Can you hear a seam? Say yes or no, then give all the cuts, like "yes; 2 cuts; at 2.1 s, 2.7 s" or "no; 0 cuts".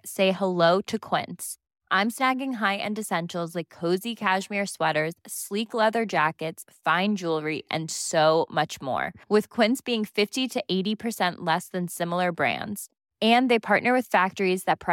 no; 0 cuts